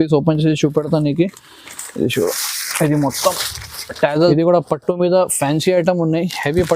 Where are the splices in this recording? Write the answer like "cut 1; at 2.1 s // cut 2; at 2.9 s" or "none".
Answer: cut 1; at 4.1 s